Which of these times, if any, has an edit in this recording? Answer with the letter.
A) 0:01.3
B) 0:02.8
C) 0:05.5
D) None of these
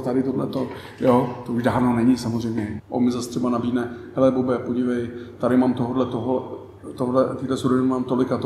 B